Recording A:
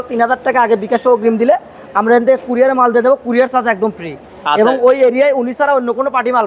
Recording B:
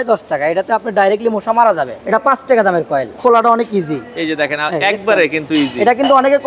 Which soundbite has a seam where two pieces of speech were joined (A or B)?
B